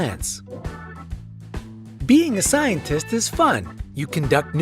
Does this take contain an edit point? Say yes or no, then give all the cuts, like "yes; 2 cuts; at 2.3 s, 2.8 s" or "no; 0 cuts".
yes; 1 cut; at 3.0 s